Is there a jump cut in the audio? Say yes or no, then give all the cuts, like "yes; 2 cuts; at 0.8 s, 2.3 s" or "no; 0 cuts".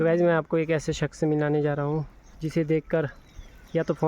yes; 1 cut; at 2.2 s